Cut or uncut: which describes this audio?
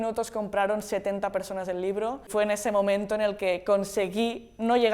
cut